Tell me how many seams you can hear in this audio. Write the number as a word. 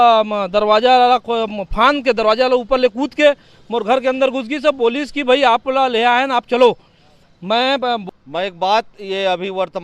one